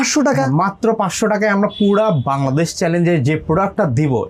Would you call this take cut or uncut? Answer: uncut